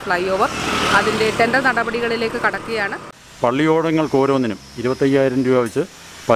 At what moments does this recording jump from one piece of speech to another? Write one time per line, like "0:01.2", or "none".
0:03.2